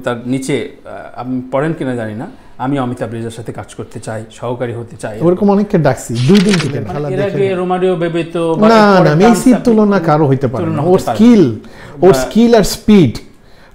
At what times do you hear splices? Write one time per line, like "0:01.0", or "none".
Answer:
0:06.9